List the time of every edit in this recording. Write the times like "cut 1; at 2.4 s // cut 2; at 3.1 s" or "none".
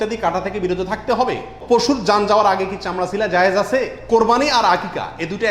cut 1; at 1.5 s // cut 2; at 4.0 s